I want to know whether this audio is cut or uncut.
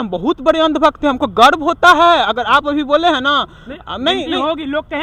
uncut